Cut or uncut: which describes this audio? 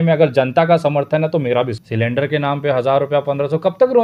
cut